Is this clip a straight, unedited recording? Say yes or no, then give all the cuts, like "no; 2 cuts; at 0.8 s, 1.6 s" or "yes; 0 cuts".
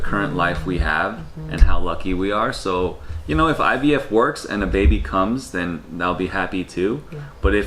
yes; 0 cuts